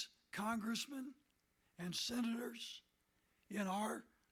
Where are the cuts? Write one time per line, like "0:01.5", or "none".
none